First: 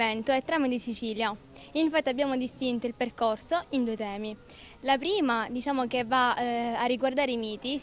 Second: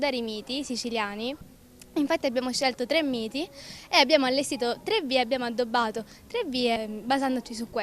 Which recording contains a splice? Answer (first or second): second